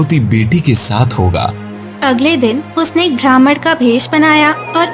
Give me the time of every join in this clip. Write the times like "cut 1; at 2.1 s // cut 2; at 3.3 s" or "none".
cut 1; at 1.6 s